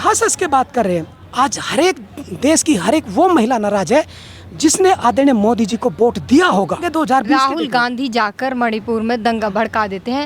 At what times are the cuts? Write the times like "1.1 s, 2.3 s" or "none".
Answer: 1.2 s, 6.9 s